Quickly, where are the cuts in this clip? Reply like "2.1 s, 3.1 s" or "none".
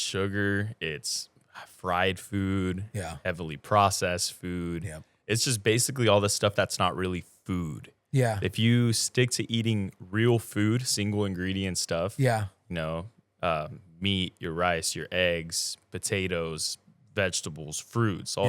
none